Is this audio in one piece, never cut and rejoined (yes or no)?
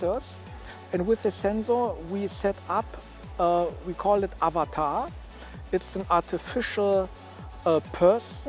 yes